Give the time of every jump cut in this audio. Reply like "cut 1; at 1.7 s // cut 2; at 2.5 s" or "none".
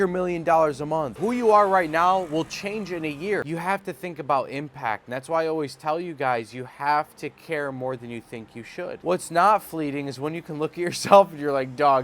cut 1; at 1.1 s // cut 2; at 3.5 s // cut 3; at 8.9 s